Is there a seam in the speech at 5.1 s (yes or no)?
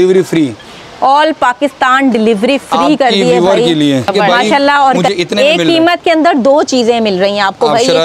yes